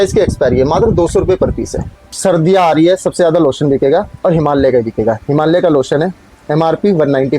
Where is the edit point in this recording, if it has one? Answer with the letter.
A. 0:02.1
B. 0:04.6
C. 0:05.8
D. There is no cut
A